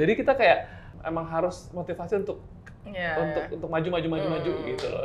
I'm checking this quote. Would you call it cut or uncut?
uncut